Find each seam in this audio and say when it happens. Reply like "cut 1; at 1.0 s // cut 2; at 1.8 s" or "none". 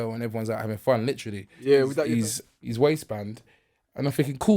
cut 1; at 2.0 s